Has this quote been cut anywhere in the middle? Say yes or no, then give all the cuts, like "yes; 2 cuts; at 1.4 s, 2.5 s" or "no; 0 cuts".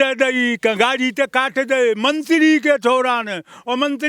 no; 0 cuts